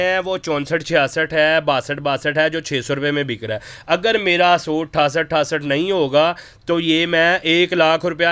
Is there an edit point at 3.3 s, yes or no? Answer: no